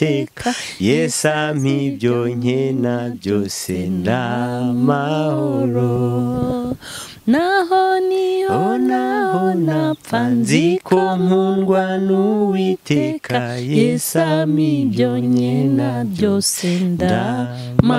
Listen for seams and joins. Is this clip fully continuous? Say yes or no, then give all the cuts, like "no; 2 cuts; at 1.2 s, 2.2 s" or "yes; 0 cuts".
yes; 0 cuts